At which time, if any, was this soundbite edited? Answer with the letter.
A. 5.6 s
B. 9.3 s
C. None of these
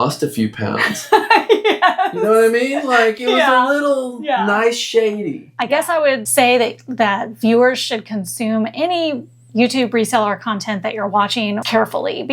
A